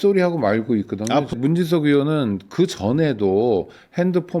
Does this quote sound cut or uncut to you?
cut